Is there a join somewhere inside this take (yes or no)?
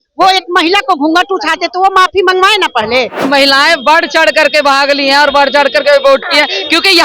yes